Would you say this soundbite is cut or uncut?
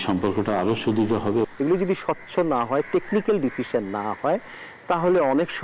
cut